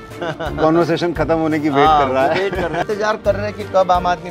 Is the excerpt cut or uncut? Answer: cut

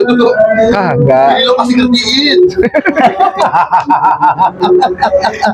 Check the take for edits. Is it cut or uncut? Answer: uncut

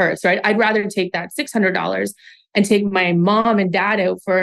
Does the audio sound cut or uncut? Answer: uncut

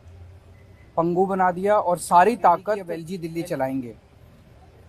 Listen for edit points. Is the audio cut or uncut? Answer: cut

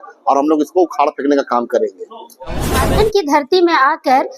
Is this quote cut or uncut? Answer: cut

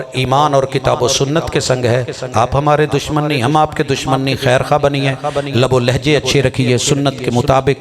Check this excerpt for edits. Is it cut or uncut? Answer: uncut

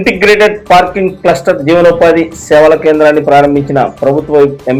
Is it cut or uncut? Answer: uncut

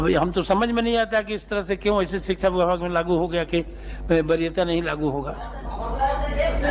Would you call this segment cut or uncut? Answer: uncut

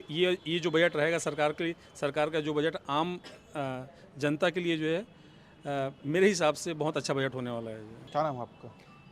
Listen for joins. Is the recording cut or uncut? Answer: uncut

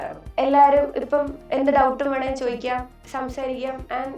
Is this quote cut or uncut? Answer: cut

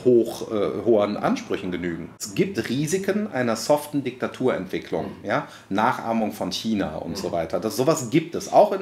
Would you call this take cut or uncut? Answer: cut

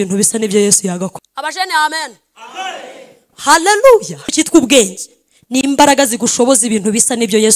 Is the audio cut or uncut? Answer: cut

